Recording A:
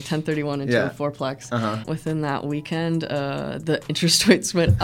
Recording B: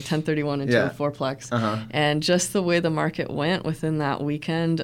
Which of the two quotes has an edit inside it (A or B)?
A